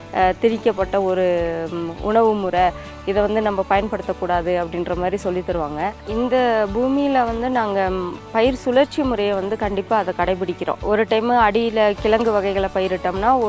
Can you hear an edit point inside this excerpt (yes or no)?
yes